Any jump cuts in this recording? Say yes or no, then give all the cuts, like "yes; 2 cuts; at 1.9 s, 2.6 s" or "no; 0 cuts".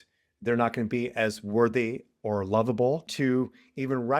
yes; 1 cut; at 3.1 s